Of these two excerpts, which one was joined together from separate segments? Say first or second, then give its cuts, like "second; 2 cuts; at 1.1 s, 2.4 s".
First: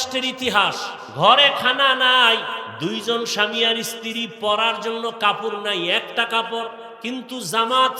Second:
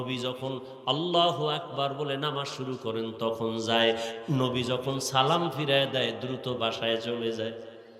first; 3 cuts; at 1.0 s, 2.7 s, 6.9 s